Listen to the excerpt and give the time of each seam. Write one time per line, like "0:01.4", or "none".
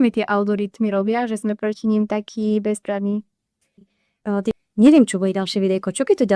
0:04.1